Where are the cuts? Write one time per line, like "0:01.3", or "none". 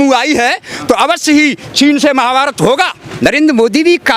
0:03.0